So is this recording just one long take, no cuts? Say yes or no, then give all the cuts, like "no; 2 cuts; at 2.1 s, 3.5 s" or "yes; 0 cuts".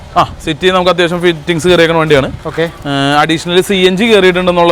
yes; 0 cuts